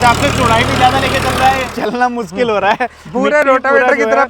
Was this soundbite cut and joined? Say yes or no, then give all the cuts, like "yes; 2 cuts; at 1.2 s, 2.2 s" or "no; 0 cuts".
yes; 1 cut; at 1.7 s